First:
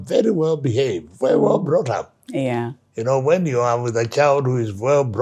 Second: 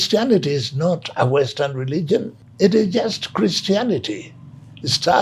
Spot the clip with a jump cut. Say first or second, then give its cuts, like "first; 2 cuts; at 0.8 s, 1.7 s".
second; 1 cut; at 2.4 s